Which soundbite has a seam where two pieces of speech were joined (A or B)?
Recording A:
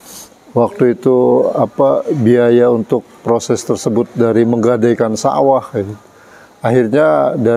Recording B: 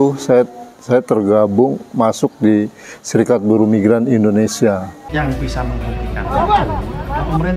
B